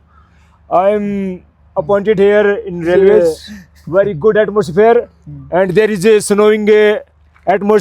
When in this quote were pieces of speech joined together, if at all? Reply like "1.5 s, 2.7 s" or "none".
3.2 s